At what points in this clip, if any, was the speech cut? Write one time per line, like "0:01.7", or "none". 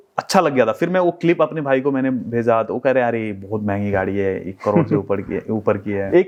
none